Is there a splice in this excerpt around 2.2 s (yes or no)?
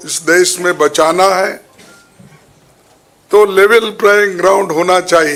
no